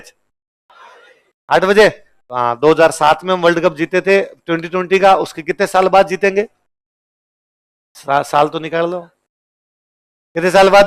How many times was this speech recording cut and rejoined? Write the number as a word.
zero